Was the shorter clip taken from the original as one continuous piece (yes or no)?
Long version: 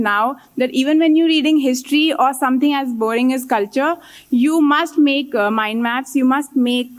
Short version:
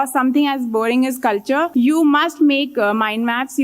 no